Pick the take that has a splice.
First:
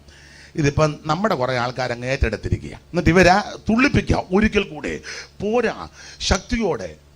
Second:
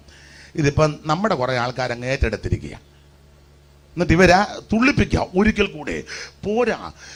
first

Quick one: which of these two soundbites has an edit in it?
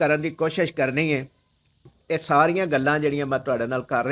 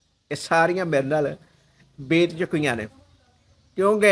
first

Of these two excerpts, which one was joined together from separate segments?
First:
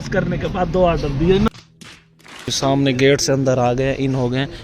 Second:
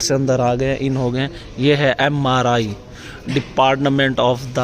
first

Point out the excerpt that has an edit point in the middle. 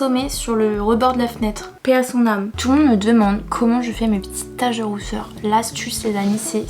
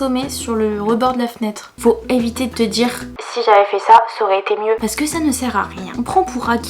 second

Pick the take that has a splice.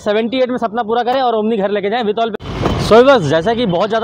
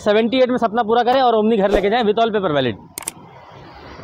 first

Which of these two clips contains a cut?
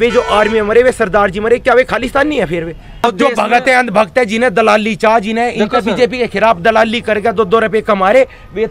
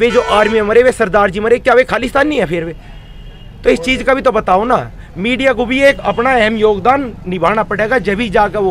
first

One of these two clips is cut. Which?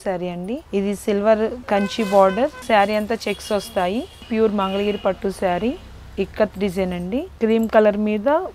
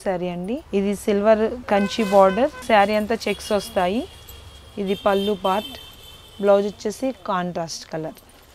first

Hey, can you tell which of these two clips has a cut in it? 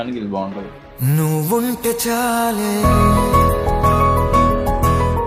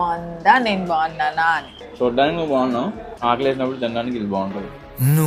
second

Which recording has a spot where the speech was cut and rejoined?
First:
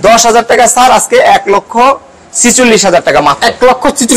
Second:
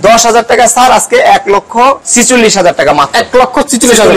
second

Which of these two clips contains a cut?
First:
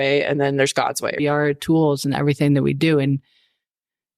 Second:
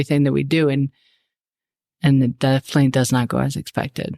first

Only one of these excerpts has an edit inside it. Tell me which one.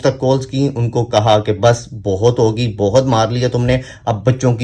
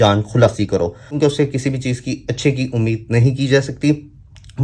second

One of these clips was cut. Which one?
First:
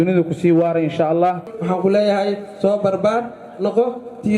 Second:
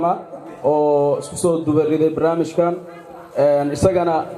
first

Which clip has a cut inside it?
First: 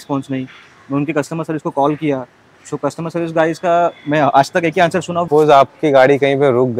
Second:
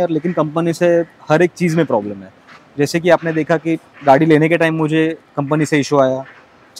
first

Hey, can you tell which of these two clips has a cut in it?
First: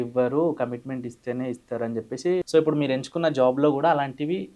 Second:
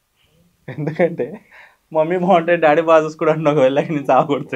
first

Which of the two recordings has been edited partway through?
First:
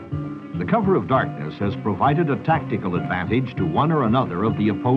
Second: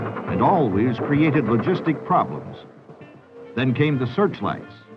second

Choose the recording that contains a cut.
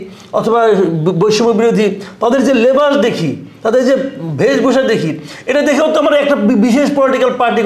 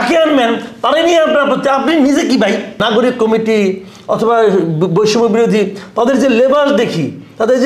second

